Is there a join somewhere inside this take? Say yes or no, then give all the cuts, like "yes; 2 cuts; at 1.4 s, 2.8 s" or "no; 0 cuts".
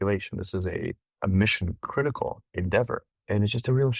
yes; 3 cuts; at 1.1 s, 2.5 s, 3.1 s